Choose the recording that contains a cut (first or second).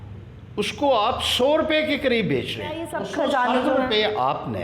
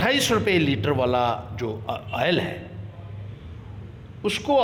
first